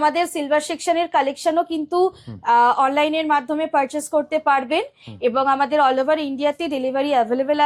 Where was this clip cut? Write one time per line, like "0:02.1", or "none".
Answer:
none